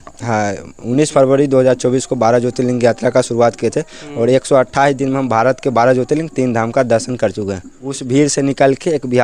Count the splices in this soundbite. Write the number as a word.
one